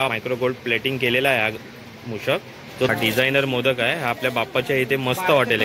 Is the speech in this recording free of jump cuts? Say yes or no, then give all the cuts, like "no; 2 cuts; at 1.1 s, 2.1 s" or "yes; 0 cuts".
no; 1 cut; at 2.9 s